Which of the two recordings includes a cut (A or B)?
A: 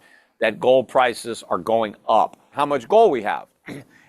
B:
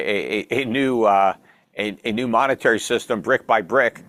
A